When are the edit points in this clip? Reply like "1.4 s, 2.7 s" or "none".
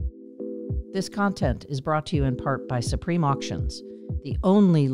0.9 s